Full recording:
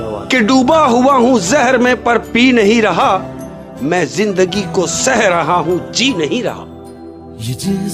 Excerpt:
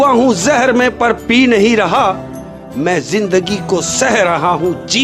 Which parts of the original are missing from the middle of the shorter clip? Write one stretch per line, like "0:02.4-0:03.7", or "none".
none